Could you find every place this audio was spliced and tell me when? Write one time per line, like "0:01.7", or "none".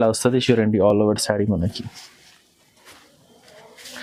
none